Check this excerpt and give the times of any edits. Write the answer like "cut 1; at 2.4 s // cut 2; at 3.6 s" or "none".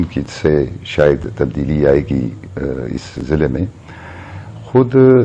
none